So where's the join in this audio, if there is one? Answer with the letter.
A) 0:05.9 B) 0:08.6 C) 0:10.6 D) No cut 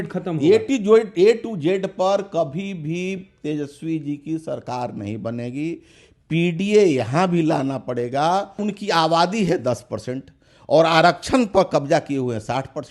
B